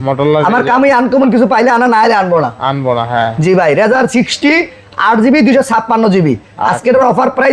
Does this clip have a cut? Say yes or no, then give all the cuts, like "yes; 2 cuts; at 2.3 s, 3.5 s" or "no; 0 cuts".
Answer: no; 0 cuts